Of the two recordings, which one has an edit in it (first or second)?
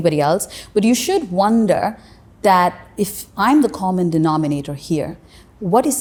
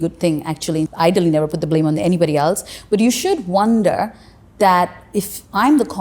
second